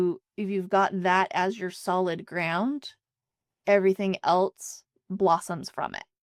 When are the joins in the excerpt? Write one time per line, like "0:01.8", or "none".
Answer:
none